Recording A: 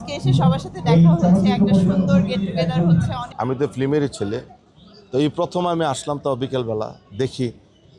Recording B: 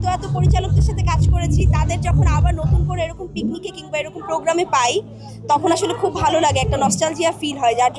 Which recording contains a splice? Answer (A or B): A